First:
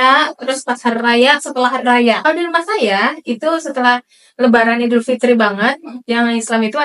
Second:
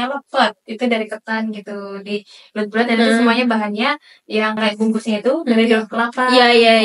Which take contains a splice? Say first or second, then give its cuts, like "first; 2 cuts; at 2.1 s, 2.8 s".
first; 1 cut; at 2.2 s